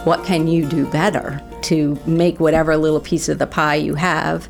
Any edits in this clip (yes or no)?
yes